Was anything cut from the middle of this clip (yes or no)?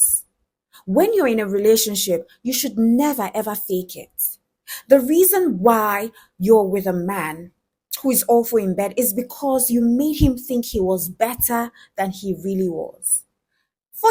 no